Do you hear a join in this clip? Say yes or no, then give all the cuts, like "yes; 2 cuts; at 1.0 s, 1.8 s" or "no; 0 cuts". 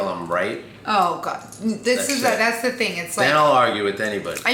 no; 0 cuts